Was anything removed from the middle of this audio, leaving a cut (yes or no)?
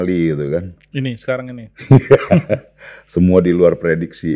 no